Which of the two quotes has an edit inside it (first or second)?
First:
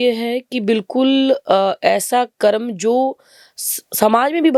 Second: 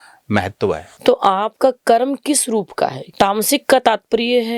second